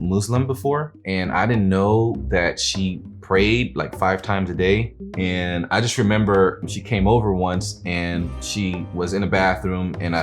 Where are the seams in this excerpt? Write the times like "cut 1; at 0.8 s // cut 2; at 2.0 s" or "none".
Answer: cut 1; at 1.0 s // cut 2; at 2.2 s // cut 3; at 5.0 s // cut 4; at 6.6 s // cut 5; at 8.5 s